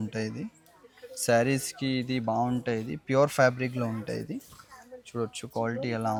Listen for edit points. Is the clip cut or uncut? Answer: uncut